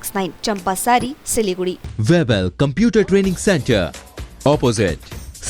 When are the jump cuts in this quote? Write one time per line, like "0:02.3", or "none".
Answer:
0:01.8

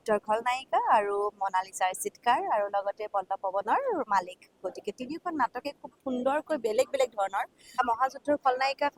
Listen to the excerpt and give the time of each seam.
none

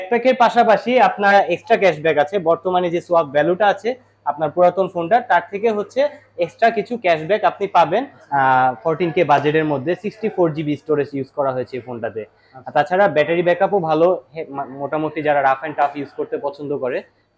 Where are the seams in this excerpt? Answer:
0:01.3
0:08.2

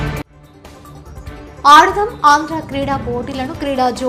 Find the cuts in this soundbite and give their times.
none

